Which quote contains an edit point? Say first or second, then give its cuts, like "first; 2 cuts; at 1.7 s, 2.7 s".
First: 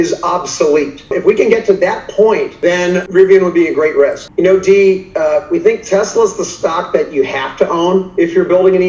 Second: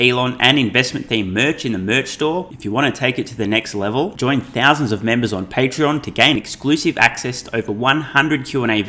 first; 3 cuts; at 1.0 s, 2.5 s, 4.2 s